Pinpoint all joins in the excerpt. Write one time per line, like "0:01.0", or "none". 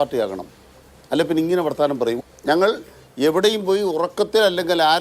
0:02.2